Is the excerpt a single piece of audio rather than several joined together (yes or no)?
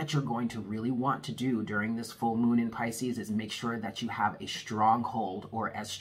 yes